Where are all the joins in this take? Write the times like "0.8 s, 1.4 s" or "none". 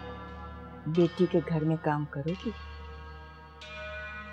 none